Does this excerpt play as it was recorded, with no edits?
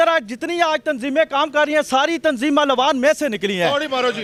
yes; 0 cuts

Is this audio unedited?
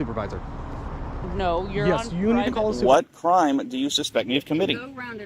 no; 1 cut; at 2.8 s

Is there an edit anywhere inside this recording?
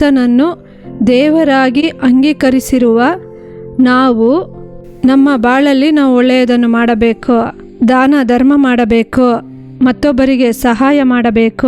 no; 0 cuts

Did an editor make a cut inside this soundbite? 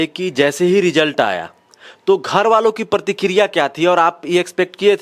no; 0 cuts

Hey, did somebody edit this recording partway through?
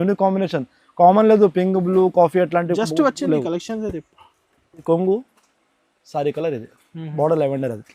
yes; 1 cut; at 4.8 s

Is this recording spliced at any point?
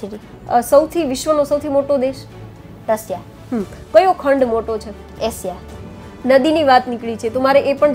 yes; 1 cut; at 6.0 s

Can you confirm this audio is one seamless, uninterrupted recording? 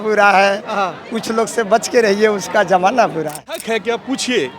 no; 1 cut; at 3.6 s

